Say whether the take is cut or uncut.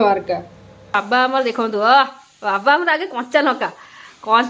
cut